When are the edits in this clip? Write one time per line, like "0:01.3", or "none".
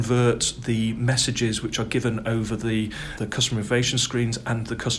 none